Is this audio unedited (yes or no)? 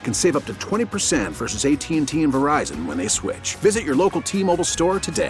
yes